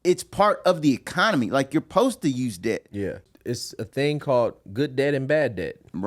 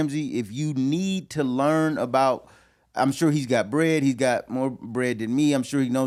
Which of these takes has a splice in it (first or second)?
first